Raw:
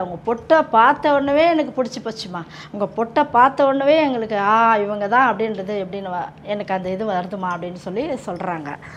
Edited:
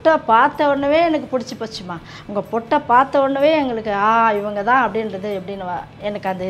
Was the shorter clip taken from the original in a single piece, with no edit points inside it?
yes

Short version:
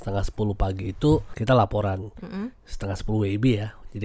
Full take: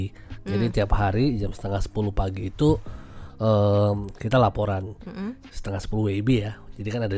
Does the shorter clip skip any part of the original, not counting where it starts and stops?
yes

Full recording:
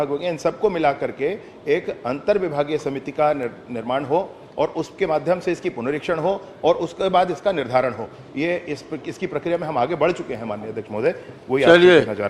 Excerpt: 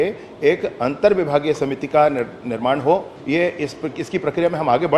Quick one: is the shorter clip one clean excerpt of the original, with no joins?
no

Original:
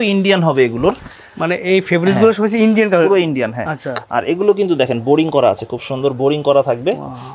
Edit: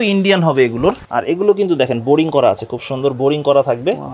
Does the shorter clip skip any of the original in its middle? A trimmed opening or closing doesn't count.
yes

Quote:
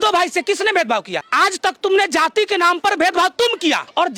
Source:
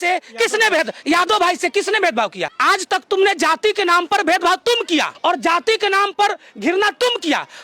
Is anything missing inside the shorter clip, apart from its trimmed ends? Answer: no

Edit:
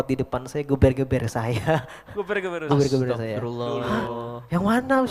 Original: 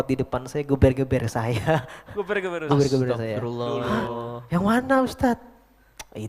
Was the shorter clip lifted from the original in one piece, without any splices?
yes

